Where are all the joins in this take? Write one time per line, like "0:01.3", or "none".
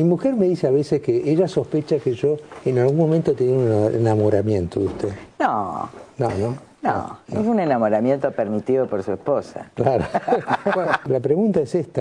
0:11.0